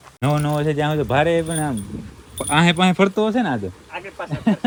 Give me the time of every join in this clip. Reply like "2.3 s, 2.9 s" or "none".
none